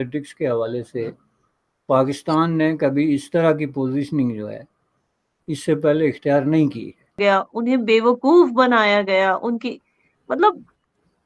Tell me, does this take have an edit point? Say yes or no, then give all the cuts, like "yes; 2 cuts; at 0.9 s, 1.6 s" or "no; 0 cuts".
yes; 1 cut; at 7.2 s